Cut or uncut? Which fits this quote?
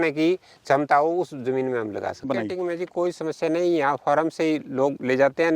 cut